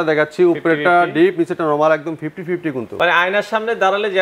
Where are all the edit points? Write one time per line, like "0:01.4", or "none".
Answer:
0:02.9